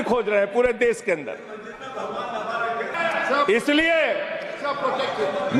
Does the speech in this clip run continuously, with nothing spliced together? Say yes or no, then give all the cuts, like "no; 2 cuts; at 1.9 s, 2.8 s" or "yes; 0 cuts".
no; 1 cut; at 2.9 s